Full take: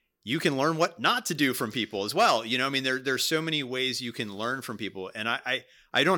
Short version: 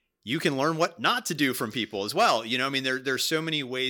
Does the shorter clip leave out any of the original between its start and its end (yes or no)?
no